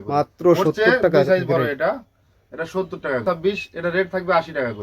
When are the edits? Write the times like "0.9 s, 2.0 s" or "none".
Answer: 3.2 s